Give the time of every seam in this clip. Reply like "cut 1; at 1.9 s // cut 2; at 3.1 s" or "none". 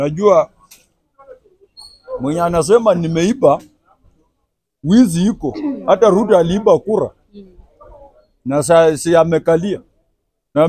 none